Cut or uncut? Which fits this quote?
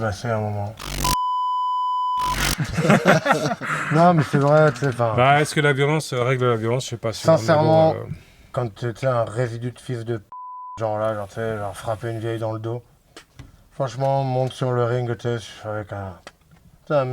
uncut